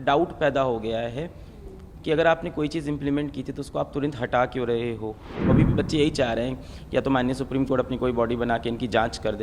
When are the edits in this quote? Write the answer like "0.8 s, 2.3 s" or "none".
5.5 s